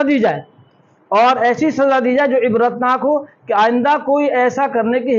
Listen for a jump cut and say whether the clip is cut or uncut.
uncut